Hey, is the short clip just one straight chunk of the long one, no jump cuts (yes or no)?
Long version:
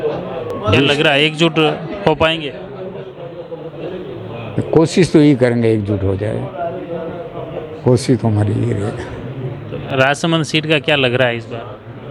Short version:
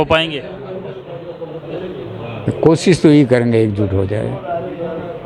yes